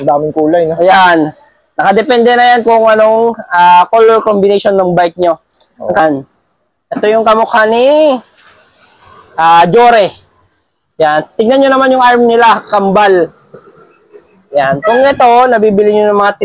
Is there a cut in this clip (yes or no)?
yes